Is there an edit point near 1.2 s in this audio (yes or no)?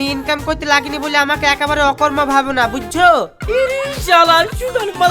no